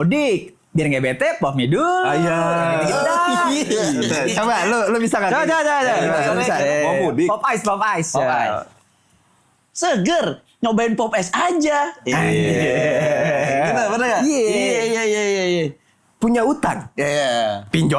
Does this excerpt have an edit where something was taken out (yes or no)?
no